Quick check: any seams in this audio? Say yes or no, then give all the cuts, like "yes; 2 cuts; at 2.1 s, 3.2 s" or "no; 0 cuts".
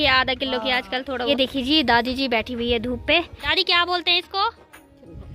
yes; 2 cuts; at 1.3 s, 3.5 s